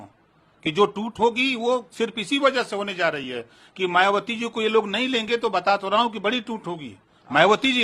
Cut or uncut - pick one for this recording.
uncut